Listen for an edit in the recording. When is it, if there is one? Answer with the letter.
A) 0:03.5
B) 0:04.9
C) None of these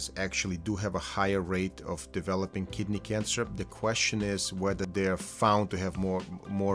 B